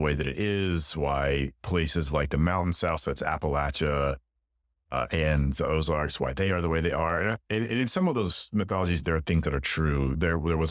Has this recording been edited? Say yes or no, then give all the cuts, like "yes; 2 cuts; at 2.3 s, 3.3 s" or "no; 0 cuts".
yes; 1 cut; at 9.0 s